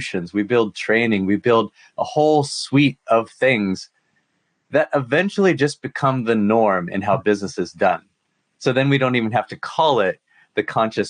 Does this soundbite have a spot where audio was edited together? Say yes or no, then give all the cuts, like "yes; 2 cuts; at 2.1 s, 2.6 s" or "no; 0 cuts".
no; 0 cuts